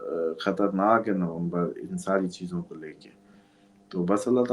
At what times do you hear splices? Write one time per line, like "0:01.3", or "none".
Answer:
none